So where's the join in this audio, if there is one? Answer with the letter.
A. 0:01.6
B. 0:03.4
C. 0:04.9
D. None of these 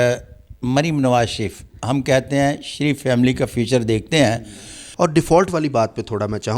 C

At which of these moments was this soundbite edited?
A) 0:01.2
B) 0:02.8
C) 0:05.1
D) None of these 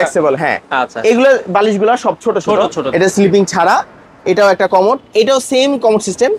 B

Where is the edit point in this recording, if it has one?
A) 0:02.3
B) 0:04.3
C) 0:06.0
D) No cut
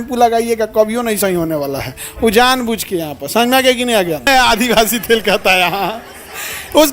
B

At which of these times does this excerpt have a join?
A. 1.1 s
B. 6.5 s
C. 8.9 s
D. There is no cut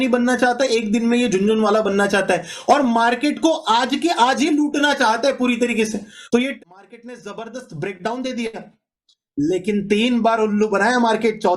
B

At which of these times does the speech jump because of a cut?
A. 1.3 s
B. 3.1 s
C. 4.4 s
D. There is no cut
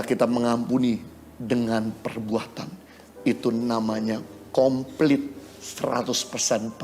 D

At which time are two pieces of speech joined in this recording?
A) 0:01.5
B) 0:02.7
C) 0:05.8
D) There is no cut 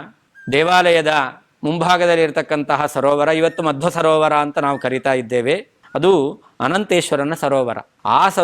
C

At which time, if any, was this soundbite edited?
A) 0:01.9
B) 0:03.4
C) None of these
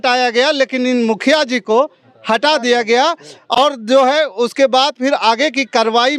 C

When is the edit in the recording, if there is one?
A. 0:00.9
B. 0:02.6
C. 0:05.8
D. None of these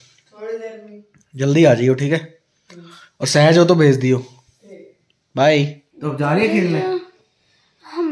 C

